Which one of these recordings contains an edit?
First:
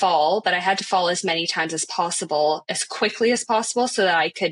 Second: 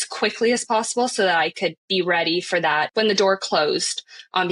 second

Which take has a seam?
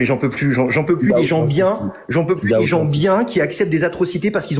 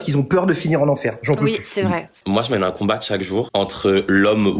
second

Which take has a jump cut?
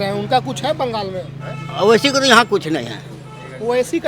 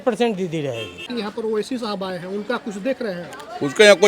second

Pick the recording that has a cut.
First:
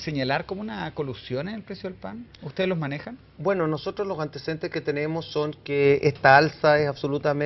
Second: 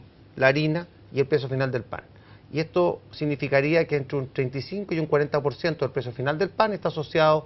second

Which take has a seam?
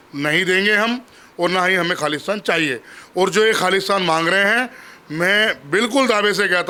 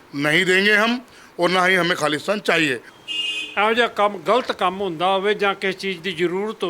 second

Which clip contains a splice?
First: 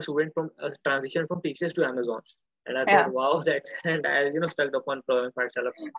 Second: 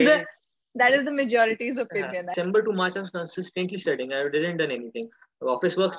second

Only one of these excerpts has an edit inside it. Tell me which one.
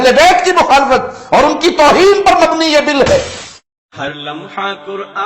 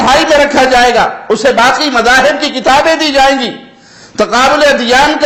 first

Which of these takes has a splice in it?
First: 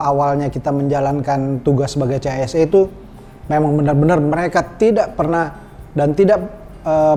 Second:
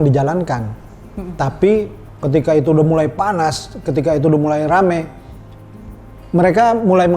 second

